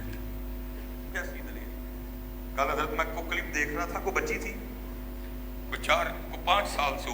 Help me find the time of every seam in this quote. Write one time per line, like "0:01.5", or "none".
0:01.1